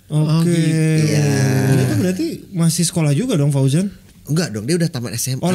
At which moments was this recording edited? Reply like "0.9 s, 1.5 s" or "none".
1.8 s, 4.0 s

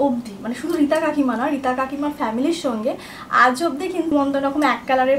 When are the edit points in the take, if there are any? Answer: 4.1 s

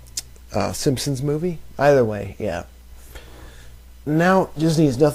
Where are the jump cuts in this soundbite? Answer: none

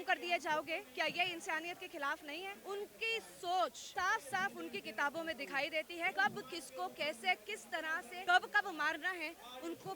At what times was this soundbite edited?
2.6 s, 3.8 s, 6.1 s, 8.1 s

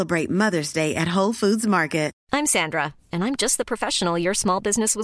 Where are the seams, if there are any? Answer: 2.2 s

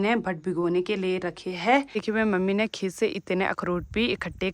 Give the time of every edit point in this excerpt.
2.0 s

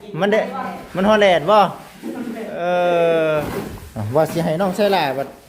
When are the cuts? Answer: 3.5 s

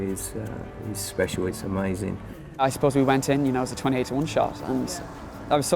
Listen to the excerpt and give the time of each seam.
2.6 s

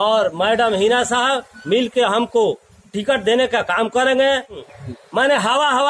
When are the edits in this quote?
4.6 s

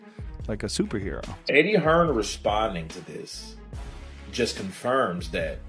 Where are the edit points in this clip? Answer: 1.3 s

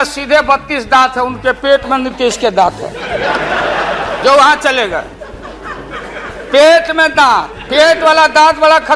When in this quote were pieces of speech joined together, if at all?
none

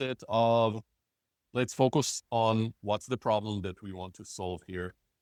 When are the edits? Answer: none

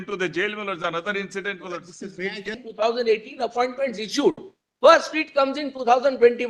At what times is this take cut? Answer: 2.6 s

